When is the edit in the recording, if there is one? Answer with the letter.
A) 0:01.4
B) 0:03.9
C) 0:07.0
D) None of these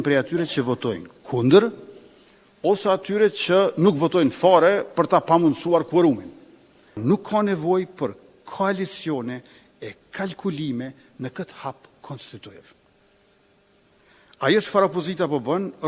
C